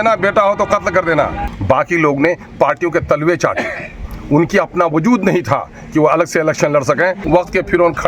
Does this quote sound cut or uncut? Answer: cut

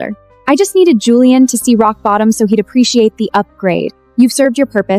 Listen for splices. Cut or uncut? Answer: uncut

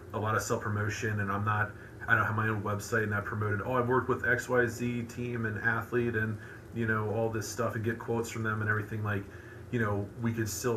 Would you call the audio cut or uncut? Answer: uncut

